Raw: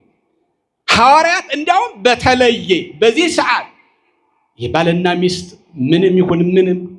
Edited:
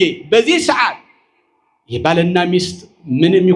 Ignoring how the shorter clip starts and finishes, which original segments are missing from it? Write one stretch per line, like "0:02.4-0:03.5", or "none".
none